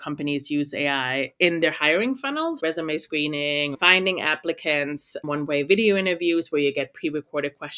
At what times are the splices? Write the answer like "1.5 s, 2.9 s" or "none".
2.6 s, 3.8 s, 5.3 s